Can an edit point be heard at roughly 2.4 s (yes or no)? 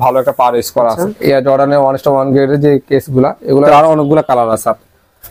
no